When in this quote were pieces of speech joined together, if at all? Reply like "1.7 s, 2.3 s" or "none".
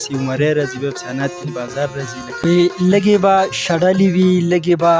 2.4 s